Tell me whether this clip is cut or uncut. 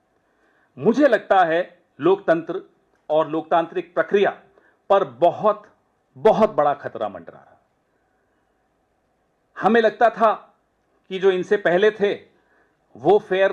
uncut